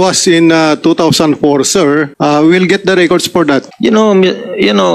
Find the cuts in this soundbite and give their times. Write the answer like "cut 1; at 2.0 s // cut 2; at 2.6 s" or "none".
cut 1; at 2.1 s // cut 2; at 3.7 s